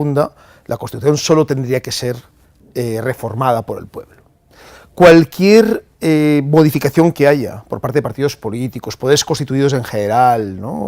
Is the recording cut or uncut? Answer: cut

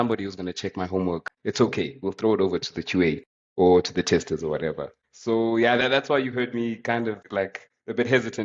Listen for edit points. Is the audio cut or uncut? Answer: uncut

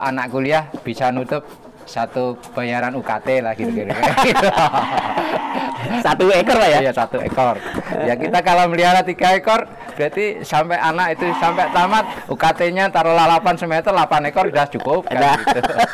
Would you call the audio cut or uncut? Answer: uncut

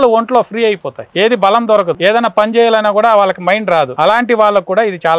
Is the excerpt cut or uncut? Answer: cut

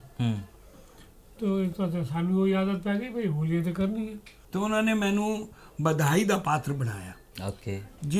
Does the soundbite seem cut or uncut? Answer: cut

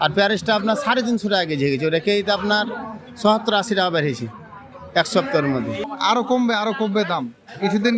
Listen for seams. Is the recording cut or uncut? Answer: cut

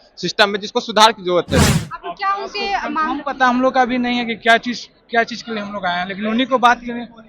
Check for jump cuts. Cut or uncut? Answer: cut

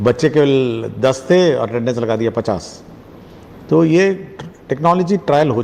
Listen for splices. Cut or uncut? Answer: uncut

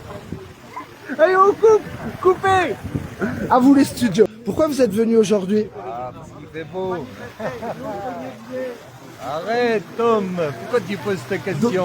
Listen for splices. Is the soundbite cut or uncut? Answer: cut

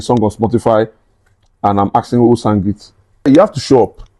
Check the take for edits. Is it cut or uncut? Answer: cut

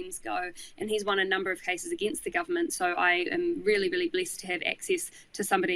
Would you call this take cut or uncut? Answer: uncut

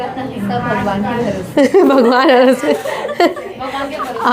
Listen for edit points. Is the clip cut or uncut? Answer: uncut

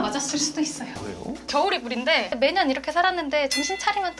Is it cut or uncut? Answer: cut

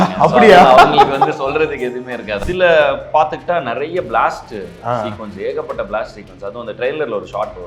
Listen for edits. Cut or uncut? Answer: cut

